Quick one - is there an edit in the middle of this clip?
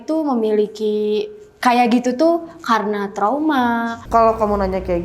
yes; 1 cut; at 4.0 s

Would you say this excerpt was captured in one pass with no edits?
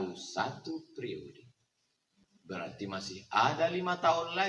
yes; 0 cuts

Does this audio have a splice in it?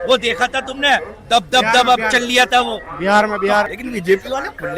yes; 1 cut; at 3.7 s

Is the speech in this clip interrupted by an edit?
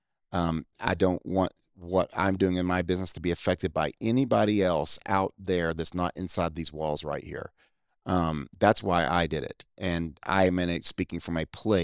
no; 0 cuts

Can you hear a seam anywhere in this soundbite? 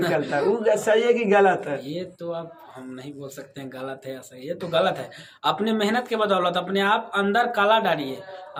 no; 0 cuts

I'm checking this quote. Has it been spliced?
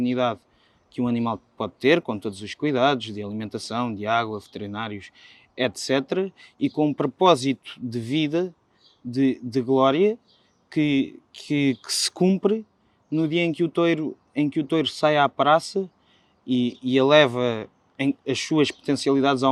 no; 0 cuts

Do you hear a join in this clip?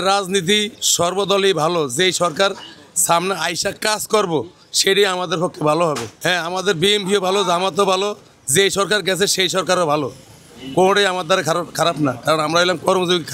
no; 0 cuts

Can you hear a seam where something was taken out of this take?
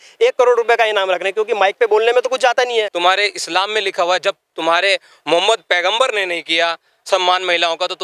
yes; 1 cut; at 2.6 s

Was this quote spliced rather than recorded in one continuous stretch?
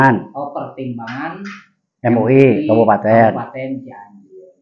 no; 0 cuts

